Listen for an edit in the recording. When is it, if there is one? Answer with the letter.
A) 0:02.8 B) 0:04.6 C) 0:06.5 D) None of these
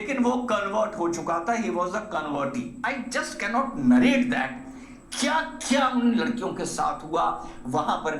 A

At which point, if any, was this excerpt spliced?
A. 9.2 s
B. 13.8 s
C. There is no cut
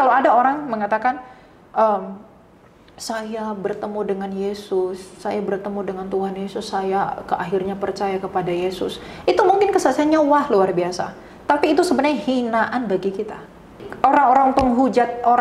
B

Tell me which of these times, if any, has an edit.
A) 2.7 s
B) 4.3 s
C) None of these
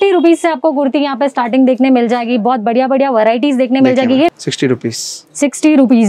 B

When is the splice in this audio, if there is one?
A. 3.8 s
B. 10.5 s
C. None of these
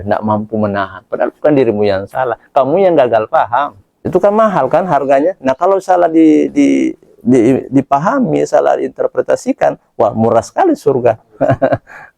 A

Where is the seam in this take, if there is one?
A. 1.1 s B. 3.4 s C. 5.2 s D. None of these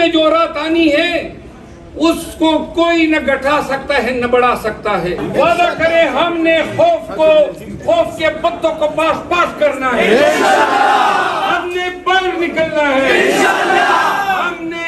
C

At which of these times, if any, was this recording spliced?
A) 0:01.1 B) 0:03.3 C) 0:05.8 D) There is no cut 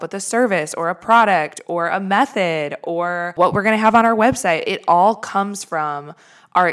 B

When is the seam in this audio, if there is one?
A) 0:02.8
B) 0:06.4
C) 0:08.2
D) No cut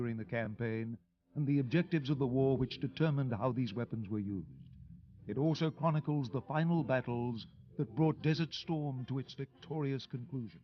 A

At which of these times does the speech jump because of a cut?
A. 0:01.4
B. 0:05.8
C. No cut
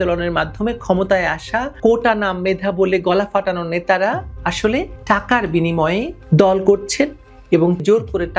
C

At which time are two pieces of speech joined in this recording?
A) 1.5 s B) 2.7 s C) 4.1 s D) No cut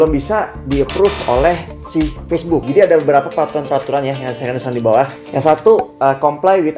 B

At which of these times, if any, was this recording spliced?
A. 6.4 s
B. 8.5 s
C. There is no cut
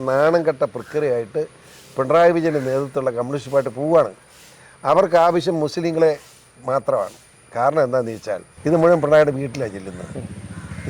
B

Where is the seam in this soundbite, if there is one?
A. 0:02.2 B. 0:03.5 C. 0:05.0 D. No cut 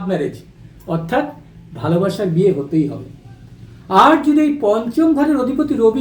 D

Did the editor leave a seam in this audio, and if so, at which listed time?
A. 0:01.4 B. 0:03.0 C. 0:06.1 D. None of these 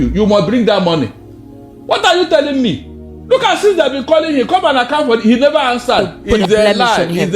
C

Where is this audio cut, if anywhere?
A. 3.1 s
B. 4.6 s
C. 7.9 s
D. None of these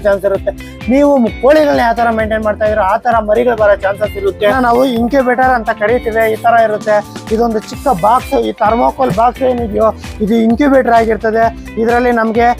B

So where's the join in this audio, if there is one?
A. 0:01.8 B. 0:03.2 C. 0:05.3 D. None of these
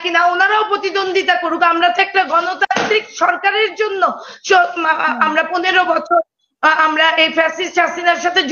D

